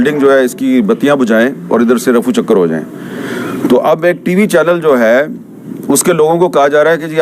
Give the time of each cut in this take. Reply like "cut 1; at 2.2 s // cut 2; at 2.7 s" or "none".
none